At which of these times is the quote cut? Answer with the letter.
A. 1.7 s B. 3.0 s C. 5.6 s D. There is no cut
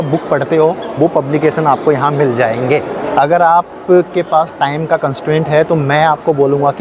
B